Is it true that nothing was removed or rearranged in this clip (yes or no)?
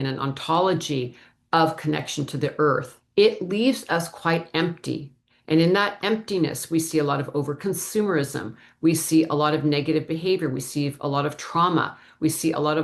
no